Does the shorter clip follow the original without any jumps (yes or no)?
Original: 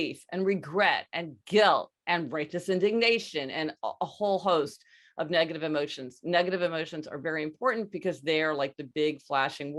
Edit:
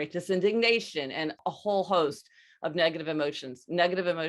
no